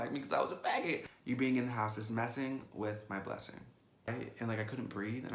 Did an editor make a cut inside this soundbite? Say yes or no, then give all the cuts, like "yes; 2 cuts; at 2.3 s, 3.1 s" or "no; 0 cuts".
yes; 2 cuts; at 1.0 s, 4.1 s